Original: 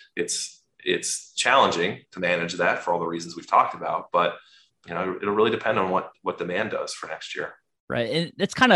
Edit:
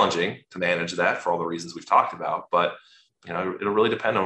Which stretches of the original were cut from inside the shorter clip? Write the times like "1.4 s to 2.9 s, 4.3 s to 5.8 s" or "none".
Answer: none